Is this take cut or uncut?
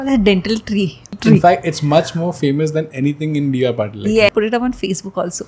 cut